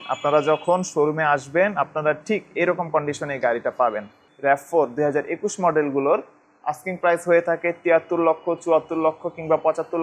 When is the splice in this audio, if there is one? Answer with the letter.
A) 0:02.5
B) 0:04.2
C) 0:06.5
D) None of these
B